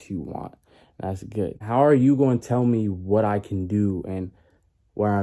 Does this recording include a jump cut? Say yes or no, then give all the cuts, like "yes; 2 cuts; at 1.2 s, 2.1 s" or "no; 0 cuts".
yes; 1 cut; at 1.6 s